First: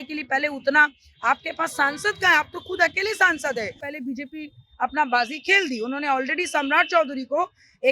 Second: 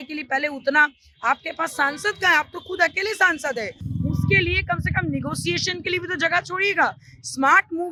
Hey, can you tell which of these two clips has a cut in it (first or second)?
first